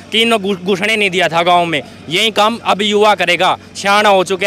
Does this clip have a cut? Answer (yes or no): no